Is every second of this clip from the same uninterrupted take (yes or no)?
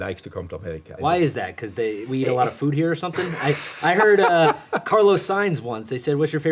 no